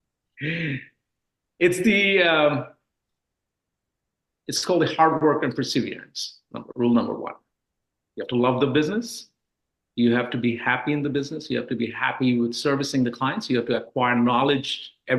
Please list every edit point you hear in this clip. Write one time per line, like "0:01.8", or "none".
none